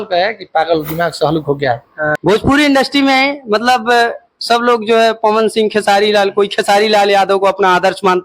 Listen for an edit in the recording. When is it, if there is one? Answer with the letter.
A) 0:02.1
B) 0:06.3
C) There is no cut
A